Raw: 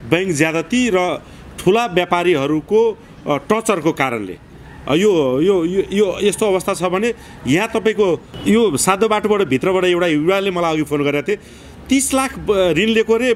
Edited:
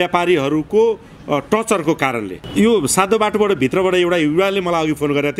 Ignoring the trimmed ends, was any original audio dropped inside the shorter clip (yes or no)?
yes